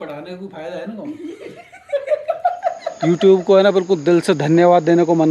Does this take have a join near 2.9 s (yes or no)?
yes